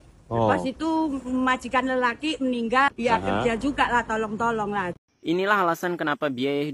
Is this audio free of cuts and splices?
no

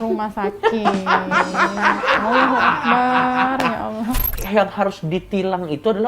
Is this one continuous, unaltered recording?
no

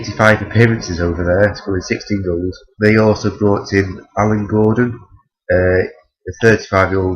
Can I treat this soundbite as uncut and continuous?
no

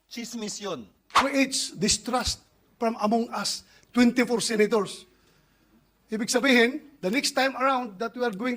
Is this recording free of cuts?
no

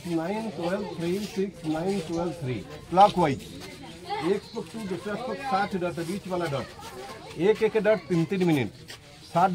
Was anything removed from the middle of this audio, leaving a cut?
no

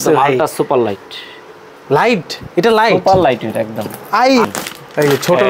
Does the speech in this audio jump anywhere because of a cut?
yes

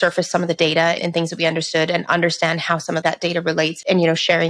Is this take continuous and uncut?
no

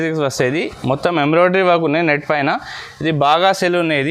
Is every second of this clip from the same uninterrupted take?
yes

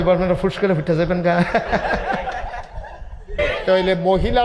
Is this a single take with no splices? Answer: no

